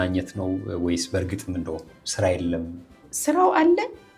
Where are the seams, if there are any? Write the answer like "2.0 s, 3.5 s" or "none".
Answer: 3.1 s